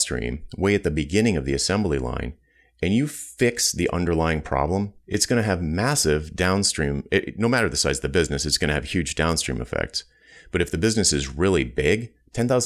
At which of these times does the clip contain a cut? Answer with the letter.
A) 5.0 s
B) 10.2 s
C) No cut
A